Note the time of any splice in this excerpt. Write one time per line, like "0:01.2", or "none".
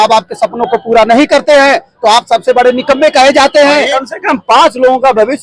0:03.9